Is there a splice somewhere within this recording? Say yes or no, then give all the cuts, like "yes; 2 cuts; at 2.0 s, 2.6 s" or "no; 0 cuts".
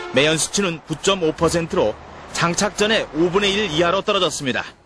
yes; 1 cut; at 0.9 s